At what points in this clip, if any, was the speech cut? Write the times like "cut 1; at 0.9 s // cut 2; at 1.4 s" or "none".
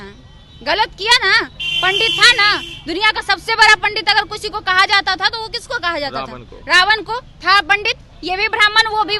none